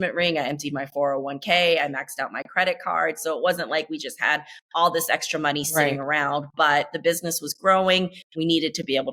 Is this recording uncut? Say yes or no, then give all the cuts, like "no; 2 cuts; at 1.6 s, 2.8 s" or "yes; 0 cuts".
yes; 0 cuts